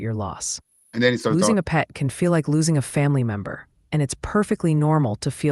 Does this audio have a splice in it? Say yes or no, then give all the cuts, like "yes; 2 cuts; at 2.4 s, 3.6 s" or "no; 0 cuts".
no; 0 cuts